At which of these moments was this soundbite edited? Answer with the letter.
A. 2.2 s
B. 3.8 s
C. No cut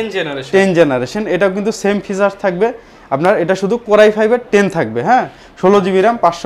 C